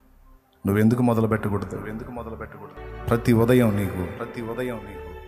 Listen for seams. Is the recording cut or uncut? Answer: cut